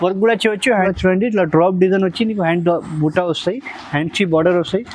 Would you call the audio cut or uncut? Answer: cut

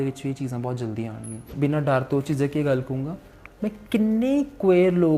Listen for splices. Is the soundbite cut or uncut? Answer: cut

